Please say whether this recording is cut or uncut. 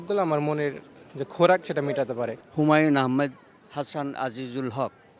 cut